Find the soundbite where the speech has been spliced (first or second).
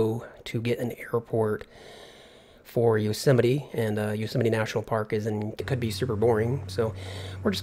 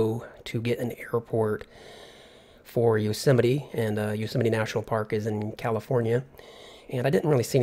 second